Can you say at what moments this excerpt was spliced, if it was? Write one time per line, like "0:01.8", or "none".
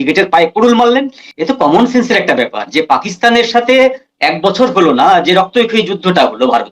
0:01.2